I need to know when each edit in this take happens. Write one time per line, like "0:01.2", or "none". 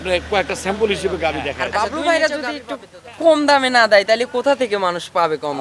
0:01.6